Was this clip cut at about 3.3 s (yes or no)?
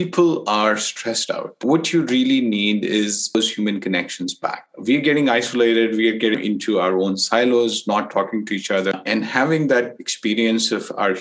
yes